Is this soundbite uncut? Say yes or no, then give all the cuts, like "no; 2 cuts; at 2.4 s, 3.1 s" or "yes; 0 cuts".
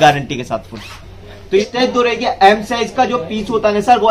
no; 1 cut; at 1.7 s